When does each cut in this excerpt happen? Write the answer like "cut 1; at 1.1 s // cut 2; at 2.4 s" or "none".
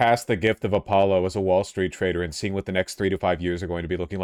none